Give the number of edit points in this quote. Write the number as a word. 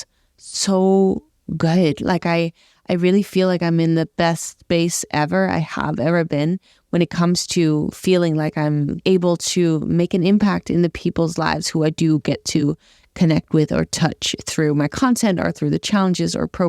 one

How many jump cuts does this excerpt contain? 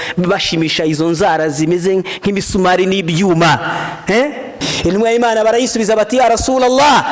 one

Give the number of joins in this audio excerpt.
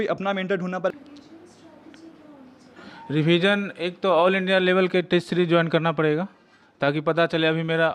one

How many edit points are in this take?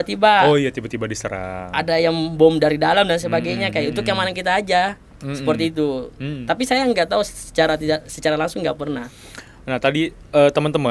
zero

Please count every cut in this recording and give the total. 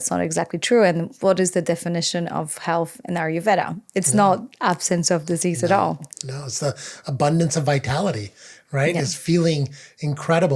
zero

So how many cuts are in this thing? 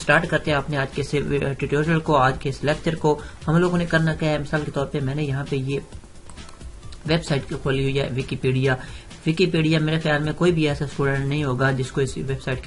zero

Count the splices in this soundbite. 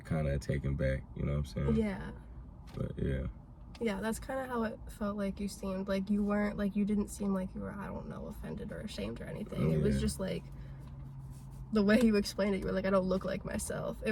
zero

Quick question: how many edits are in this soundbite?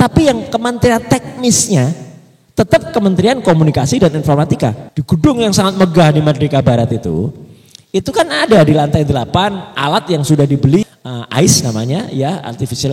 two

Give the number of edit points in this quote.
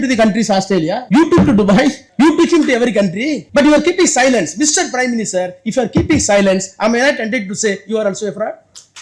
three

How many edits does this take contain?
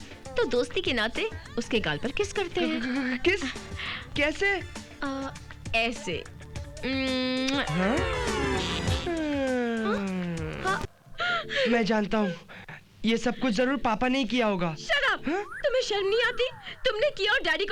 one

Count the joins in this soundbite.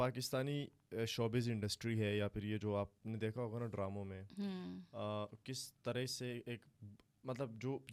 zero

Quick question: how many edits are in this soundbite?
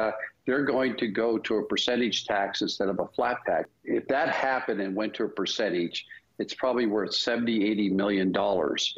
one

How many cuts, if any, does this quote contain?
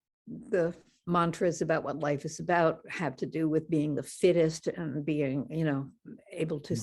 one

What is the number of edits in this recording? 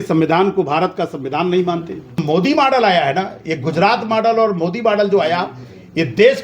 one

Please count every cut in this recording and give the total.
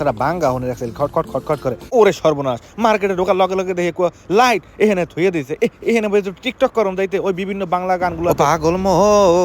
one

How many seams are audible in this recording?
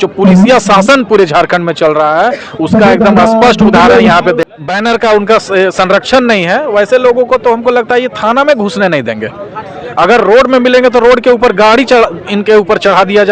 one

